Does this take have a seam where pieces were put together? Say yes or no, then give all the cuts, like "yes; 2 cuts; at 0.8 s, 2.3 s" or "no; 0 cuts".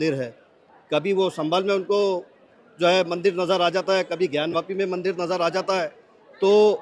no; 0 cuts